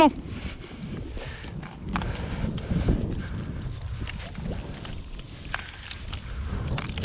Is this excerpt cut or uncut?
uncut